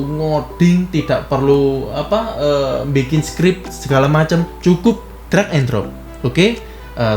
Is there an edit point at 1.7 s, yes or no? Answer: no